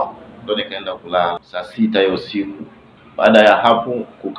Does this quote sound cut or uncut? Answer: cut